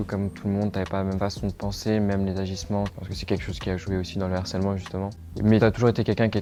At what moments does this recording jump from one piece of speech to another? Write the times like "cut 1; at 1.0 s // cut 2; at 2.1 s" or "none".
none